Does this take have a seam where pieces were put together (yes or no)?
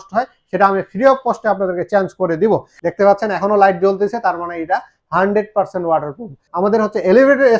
yes